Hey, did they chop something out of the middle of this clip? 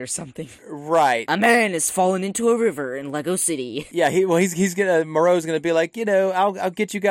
yes; 1 cut; at 3.9 s

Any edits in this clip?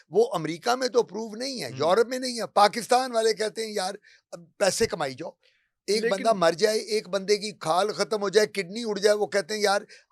no; 0 cuts

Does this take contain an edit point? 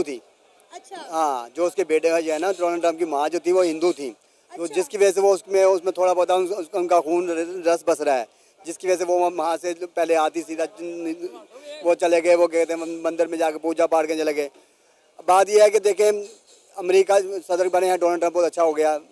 no; 0 cuts

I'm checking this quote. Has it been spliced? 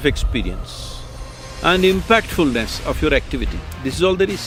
no; 0 cuts

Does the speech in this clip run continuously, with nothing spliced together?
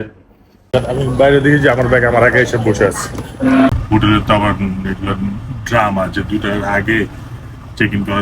no; 2 cuts; at 0.7 s, 3.7 s

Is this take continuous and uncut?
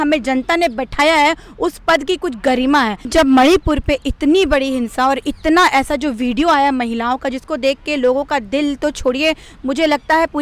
no; 1 cut; at 3.1 s

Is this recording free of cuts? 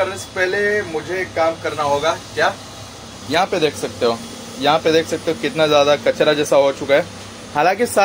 yes; 0 cuts

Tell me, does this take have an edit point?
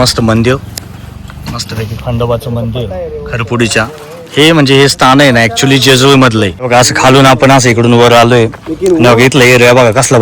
no; 0 cuts

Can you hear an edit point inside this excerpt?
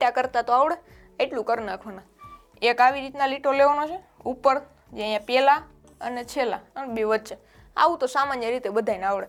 no; 0 cuts

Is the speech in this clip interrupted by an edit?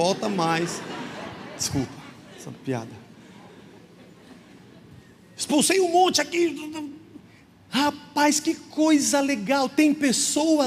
no; 0 cuts

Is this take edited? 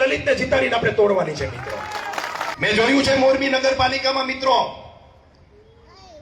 yes; 1 cut; at 2.5 s

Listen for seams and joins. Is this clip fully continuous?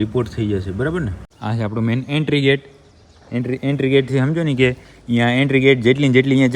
no; 1 cut; at 1.2 s

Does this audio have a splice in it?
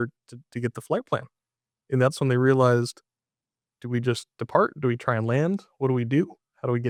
no; 0 cuts

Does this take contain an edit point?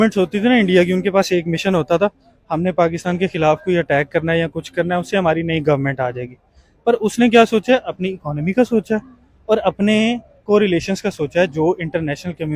no; 0 cuts

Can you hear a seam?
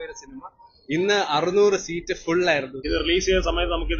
yes; 1 cut; at 2.8 s

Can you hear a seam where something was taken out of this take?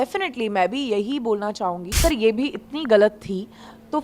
yes; 1 cut; at 2.0 s

